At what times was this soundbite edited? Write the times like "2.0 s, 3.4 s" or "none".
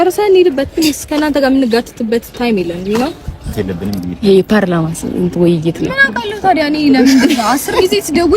3.5 s